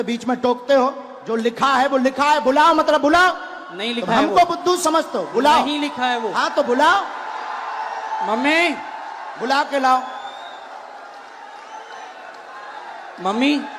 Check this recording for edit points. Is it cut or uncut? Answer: uncut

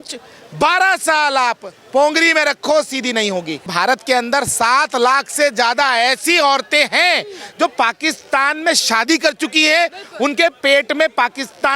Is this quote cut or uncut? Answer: cut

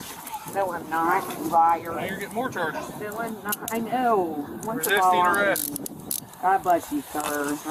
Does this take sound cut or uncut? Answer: uncut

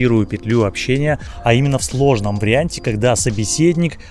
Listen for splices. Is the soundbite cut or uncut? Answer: cut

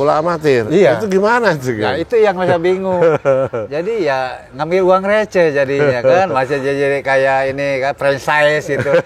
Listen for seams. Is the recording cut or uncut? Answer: uncut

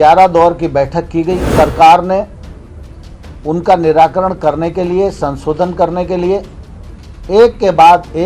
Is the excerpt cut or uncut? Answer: cut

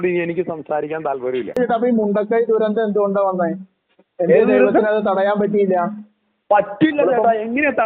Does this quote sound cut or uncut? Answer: cut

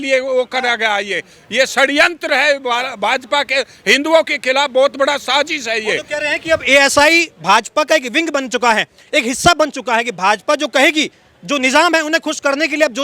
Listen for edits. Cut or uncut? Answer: uncut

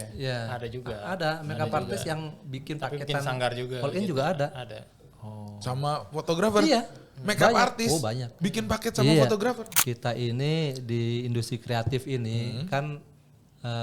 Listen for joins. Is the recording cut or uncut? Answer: cut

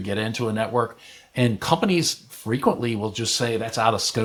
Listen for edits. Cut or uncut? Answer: uncut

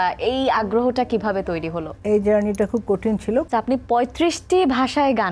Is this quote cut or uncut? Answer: cut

